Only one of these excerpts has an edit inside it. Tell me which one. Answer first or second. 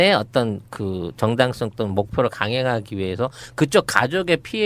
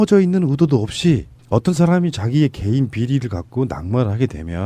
second